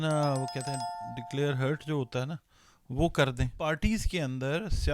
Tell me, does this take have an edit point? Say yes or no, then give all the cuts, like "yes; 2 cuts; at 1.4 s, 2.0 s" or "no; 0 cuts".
yes; 1 cut; at 3.5 s